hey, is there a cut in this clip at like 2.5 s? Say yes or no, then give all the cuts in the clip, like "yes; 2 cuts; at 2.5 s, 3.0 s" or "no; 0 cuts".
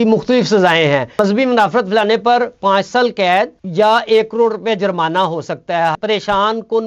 no; 2 cuts; at 1.2 s, 6.0 s